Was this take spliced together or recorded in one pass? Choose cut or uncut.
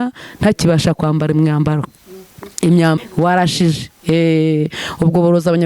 cut